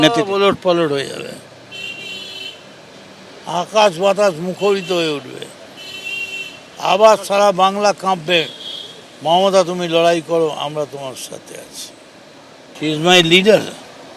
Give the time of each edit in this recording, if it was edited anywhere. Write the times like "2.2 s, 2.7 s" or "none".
12.5 s